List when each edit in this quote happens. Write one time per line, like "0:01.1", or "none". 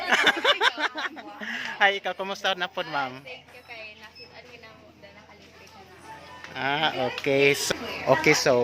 0:07.6